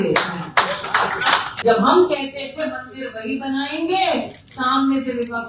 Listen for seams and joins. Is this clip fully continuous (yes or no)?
no